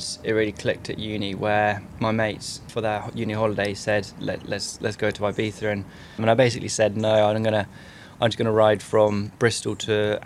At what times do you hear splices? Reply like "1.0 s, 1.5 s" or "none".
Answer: 2.3 s, 6.2 s